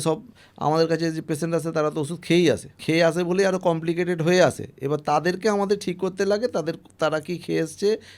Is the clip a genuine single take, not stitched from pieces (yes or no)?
no